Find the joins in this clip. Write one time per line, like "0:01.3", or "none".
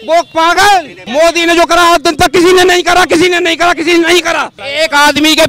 0:01.0
0:04.6